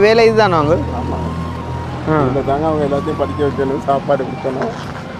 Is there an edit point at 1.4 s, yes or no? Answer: no